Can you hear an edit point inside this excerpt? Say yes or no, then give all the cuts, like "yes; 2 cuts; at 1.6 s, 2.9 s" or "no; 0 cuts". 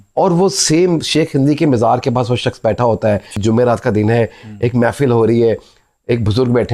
yes; 1 cut; at 3.4 s